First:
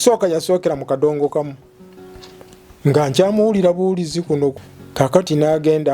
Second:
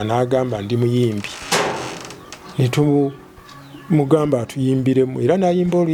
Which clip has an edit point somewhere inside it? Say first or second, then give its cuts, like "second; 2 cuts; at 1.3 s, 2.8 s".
first; 1 cut; at 4.7 s